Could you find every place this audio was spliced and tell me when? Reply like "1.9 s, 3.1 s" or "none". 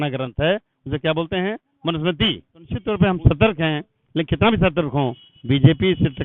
2.8 s

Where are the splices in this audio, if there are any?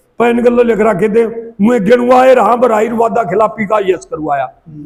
none

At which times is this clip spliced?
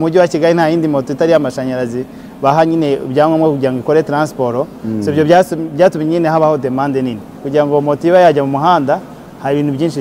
7.4 s

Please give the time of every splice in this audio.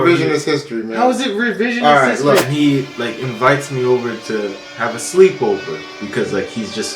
2.5 s

